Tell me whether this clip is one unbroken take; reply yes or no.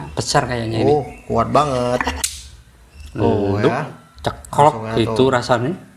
no